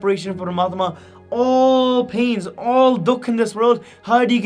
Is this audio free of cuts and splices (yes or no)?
yes